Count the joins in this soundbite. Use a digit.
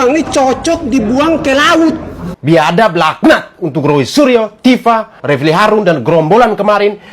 1